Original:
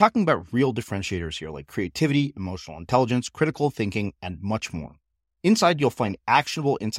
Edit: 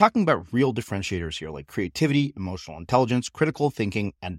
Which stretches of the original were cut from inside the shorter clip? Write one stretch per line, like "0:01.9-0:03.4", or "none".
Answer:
none